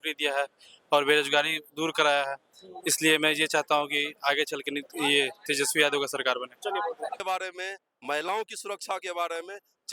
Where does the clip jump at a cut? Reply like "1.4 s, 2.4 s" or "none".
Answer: 7.2 s